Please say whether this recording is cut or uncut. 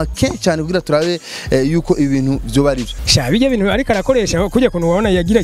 cut